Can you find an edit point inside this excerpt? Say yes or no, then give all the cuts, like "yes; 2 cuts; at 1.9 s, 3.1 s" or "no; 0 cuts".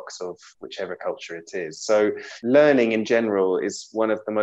yes; 1 cut; at 2.3 s